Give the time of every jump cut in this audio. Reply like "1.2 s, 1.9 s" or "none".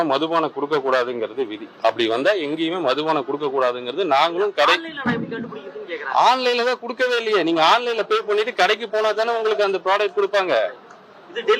none

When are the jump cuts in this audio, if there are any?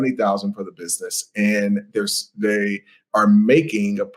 none

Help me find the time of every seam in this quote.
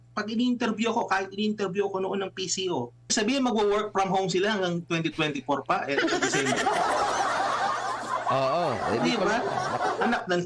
3.1 s

